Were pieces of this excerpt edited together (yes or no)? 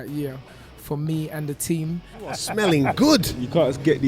yes